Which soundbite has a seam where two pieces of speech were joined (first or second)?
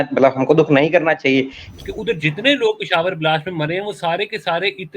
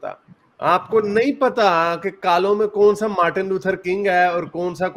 first